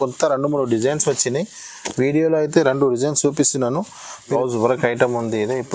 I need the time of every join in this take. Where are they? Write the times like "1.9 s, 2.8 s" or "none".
4.3 s